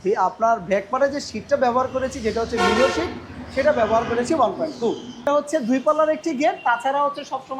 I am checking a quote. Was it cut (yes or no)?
yes